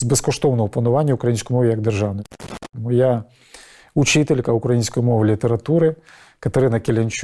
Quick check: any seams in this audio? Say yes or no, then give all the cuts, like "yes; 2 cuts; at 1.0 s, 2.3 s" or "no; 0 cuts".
yes; 1 cut; at 2.4 s